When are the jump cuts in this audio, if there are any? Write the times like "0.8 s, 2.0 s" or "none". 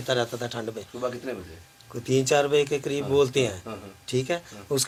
none